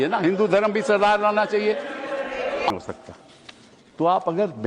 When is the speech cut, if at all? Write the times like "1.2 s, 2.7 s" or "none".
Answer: 2.7 s

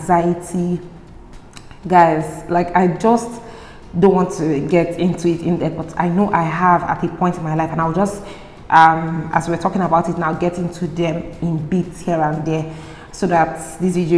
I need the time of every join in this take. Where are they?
none

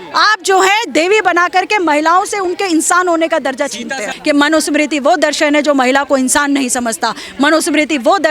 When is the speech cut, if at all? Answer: 4.1 s

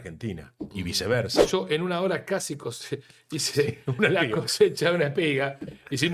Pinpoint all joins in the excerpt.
1.5 s

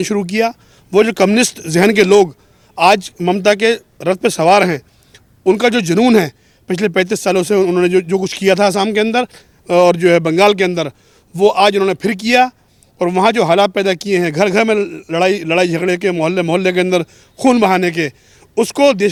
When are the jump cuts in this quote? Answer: none

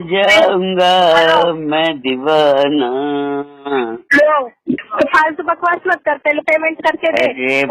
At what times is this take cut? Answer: 4.9 s

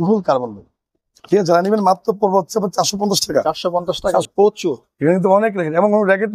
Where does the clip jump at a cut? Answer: 4.3 s

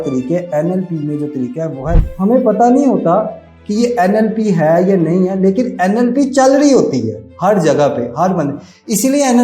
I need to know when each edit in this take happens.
2.0 s

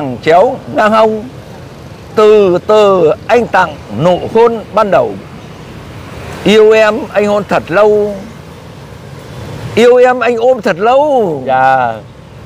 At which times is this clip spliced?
none

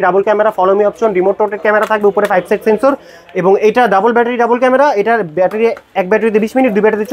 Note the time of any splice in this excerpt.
none

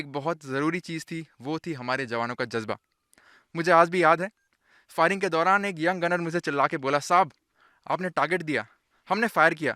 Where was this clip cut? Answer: none

